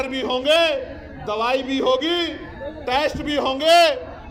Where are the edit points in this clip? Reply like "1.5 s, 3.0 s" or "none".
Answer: none